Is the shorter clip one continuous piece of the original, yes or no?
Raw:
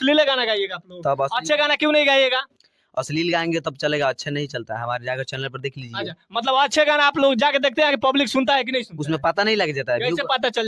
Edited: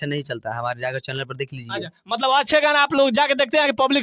yes